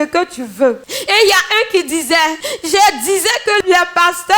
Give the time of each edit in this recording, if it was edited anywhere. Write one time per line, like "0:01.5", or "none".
0:00.9
0:02.5

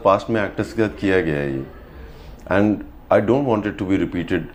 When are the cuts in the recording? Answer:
none

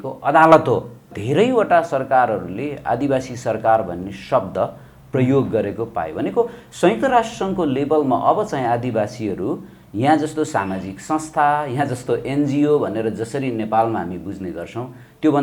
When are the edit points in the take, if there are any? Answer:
0:01.2

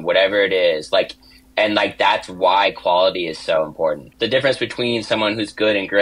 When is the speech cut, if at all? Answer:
0:04.1

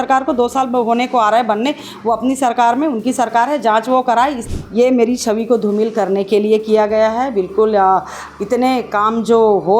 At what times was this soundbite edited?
0:04.4

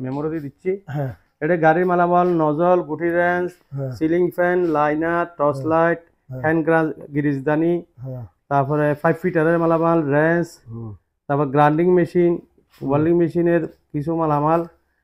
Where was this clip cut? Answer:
none

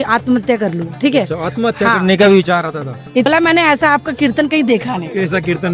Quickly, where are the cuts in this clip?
0:03.3

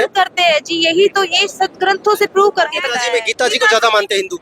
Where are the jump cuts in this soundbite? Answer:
0:02.9

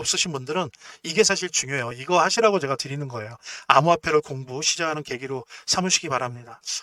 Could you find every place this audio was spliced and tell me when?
none

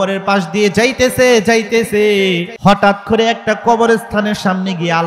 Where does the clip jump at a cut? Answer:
0:02.5

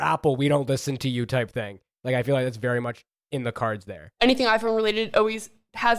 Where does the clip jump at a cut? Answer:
0:04.2

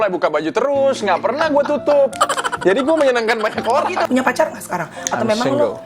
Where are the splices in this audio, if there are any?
0:04.1

